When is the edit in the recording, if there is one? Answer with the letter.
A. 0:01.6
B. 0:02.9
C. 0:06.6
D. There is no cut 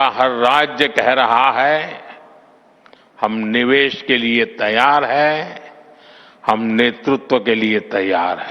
C